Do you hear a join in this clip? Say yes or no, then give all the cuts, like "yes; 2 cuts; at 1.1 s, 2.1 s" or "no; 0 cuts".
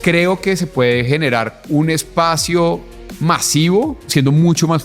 yes; 2 cuts; at 1.6 s, 4.0 s